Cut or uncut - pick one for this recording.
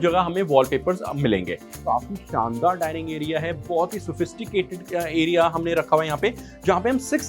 cut